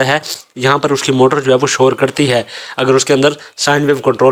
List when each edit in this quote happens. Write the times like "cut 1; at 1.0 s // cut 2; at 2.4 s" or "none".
none